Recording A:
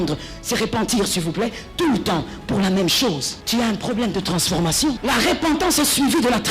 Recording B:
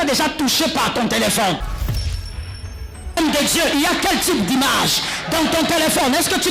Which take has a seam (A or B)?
A